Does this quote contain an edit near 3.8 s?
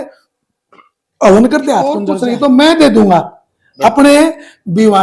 no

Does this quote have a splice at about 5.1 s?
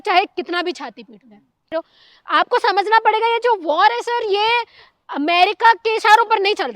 no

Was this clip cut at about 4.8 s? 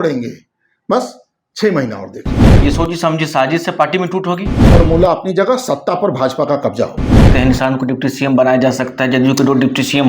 yes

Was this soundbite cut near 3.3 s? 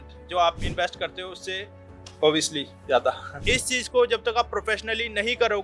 yes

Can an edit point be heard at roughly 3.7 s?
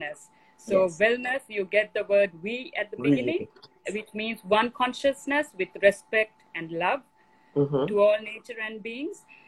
yes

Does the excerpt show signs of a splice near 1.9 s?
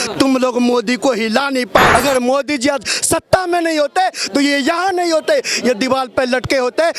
yes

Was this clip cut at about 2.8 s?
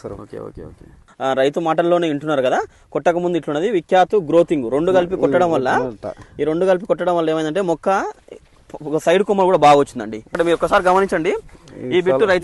no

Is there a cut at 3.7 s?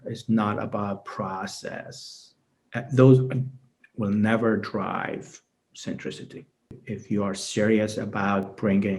no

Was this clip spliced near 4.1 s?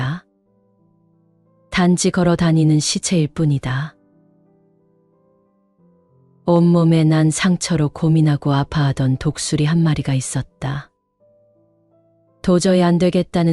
no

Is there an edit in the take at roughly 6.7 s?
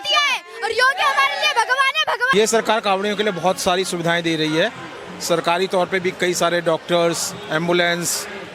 no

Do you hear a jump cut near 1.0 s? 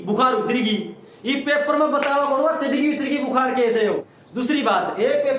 no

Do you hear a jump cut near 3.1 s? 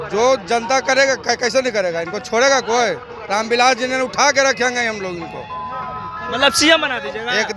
no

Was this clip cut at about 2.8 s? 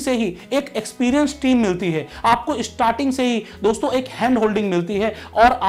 no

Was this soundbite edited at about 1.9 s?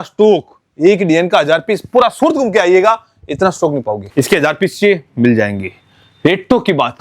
no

